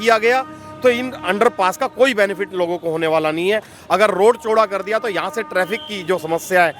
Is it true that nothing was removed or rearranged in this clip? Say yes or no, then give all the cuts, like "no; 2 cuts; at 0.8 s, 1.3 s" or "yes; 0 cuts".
yes; 0 cuts